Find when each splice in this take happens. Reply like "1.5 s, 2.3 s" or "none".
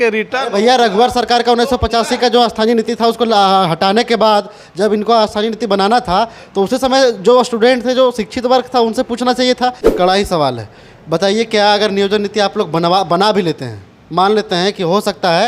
9.8 s